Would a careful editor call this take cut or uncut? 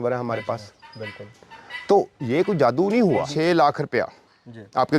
cut